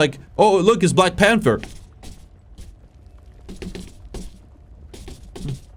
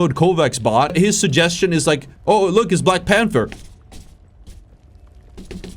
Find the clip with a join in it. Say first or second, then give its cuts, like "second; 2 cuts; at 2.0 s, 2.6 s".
second; 1 cut; at 0.9 s